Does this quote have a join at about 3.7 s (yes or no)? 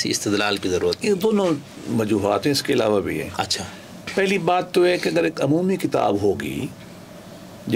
no